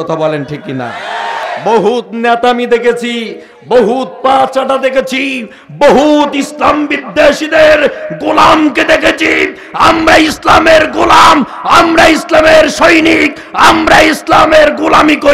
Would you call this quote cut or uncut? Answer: cut